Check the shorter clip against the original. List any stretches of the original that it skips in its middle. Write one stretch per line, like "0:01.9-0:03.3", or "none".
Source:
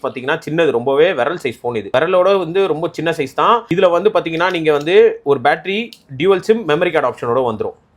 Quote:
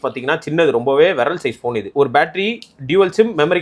0:01.9-0:05.2